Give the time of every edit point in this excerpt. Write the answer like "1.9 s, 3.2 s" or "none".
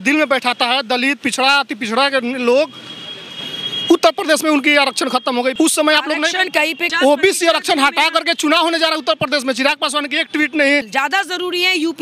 5.5 s, 6.9 s, 10.9 s